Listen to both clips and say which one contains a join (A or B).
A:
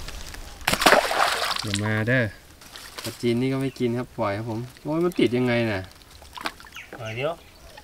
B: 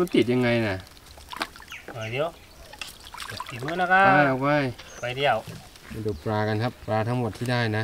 B